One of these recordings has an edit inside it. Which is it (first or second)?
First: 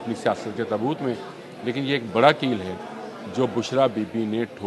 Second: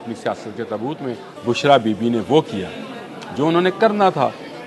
second